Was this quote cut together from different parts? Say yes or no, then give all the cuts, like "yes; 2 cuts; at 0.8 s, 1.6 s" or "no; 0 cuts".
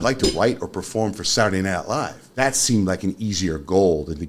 yes; 1 cut; at 2.2 s